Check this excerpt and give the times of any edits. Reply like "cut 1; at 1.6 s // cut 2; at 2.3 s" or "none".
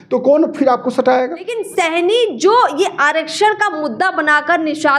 cut 1; at 1.6 s